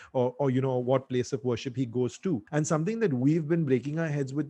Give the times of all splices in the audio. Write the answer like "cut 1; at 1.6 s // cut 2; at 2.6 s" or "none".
cut 1; at 2.4 s